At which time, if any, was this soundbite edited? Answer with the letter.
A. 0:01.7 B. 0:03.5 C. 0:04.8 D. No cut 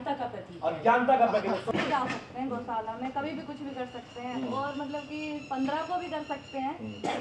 A